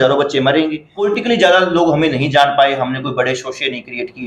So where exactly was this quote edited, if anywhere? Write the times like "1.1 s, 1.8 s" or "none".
1.1 s